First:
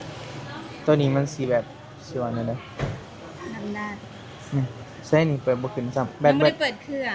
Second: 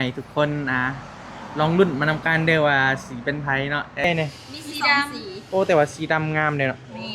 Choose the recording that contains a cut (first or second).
second